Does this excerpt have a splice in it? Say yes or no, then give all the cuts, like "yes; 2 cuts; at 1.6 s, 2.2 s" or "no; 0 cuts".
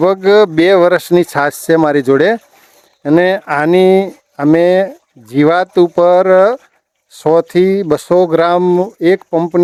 no; 0 cuts